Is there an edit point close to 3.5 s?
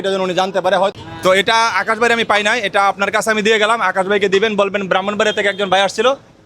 no; 1 cut; at 0.9 s

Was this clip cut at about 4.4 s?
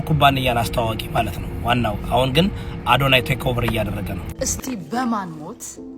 yes; 1 cut; at 4.4 s

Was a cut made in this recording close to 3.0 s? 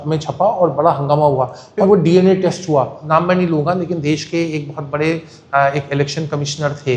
yes; 2 cuts; at 1.8 s, 3.0 s

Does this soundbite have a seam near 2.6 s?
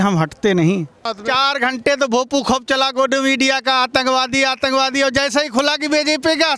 no; 1 cut; at 1.2 s

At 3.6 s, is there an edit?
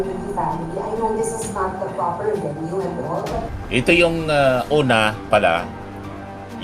yes; 1 cut; at 3.6 s

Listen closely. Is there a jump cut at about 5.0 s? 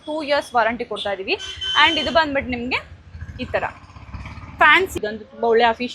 yes; 1 cut; at 5.0 s

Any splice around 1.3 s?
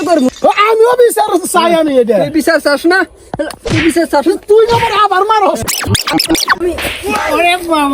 no; 1 cut; at 5.6 s

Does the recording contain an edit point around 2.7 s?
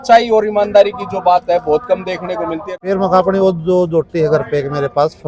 yes; 1 cut; at 2.7 s

